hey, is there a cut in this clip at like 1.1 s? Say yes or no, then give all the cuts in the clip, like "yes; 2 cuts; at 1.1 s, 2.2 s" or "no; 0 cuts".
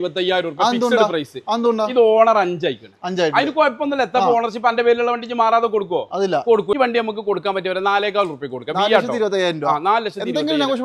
no; 1 cut; at 6.7 s